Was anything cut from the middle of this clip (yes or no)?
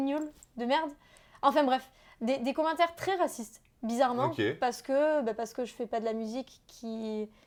no